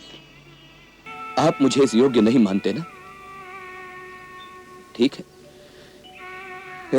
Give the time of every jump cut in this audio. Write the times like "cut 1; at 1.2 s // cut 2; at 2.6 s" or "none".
cut 1; at 1.0 s

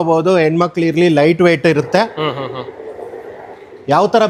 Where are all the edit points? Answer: none

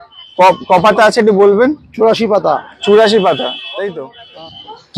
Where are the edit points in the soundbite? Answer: cut 1; at 4.0 s

